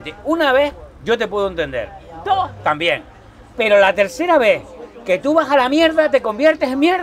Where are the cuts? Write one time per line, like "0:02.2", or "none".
none

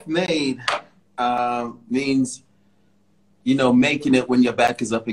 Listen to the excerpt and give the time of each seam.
none

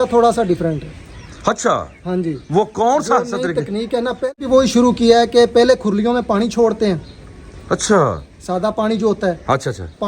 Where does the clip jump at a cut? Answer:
0:04.4

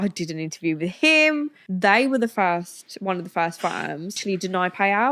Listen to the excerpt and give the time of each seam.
0:01.6
0:04.2

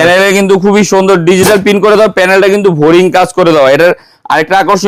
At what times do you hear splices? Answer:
none

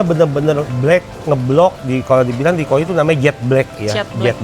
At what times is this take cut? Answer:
0:01.8

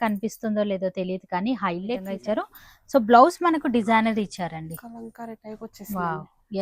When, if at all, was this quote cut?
0:02.0

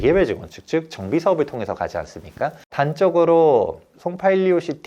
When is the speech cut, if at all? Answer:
0:02.6

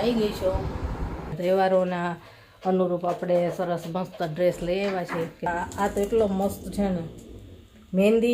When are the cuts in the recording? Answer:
0:01.4
0:05.5

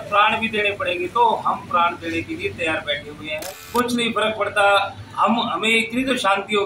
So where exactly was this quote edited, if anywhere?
0:03.8

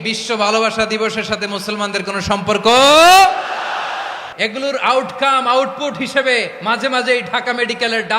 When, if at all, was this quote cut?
0:04.5

